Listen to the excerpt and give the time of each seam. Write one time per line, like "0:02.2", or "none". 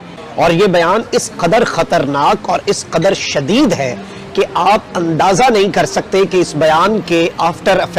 none